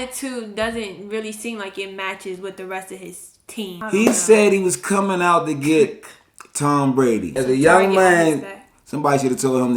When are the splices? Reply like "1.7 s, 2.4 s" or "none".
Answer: 3.8 s, 7.3 s